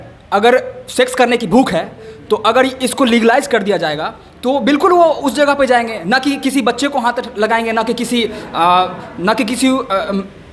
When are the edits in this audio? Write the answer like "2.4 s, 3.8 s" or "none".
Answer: none